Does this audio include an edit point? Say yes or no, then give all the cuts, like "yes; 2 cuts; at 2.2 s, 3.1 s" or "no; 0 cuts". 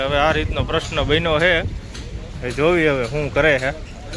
no; 0 cuts